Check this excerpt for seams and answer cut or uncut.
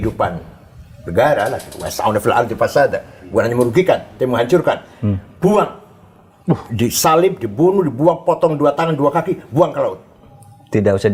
uncut